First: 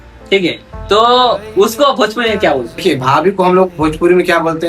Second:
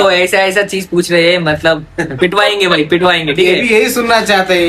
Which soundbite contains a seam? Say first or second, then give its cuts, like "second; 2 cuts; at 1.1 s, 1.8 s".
first; 1 cut; at 2.8 s